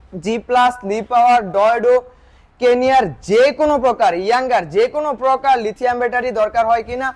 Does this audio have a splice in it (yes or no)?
no